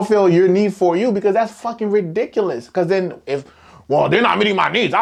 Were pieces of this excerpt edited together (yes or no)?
no